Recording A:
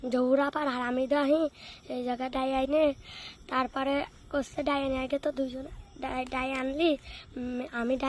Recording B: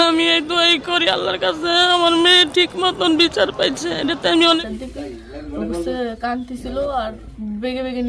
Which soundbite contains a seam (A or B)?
B